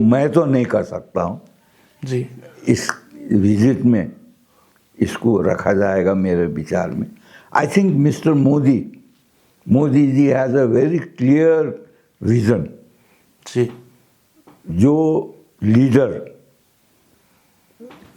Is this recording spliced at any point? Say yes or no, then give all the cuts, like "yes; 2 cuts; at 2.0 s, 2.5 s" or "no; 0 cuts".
no; 0 cuts